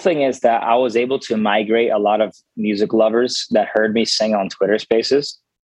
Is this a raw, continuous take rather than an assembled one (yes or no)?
yes